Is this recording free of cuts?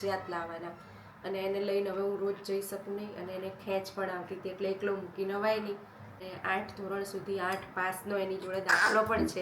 no; 1 cut; at 6.3 s

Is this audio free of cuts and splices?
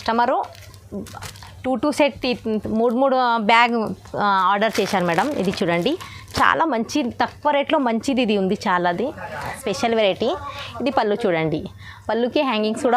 no; 1 cut; at 9.6 s

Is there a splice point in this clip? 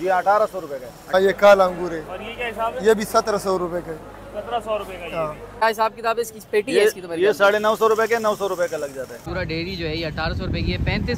yes; 3 cuts; at 1.1 s, 5.6 s, 9.2 s

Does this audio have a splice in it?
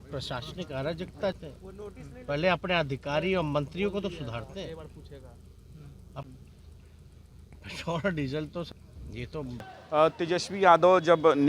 yes; 1 cut; at 1.1 s

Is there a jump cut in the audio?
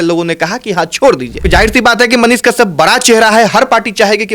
yes; 1 cut; at 1.4 s

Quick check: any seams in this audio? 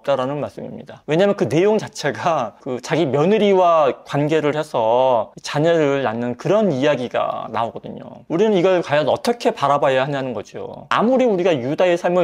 yes; 3 cuts; at 2.6 s, 8.2 s, 10.9 s

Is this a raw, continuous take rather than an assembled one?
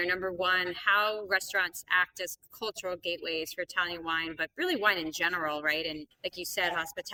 yes; 0 cuts

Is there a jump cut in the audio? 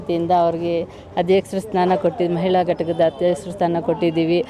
no; 0 cuts

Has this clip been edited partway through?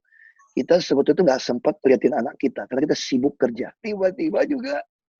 yes; 1 cut; at 3.8 s

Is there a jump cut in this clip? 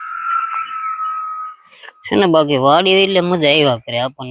no; 0 cuts

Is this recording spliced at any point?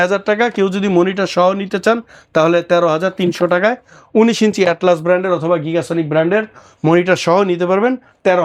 no; 0 cuts

